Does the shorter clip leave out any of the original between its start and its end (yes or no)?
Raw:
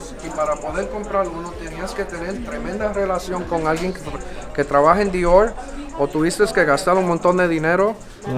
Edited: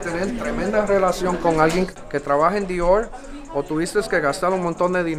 yes